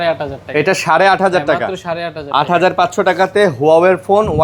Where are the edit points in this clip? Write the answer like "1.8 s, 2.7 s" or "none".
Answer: none